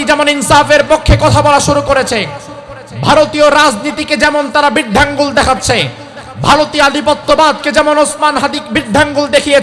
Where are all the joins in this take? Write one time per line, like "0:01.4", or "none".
none